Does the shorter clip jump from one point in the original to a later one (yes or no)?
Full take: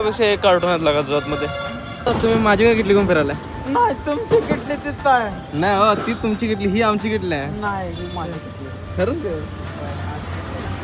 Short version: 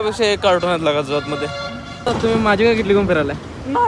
no